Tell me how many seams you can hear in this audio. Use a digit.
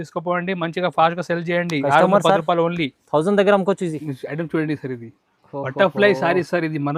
1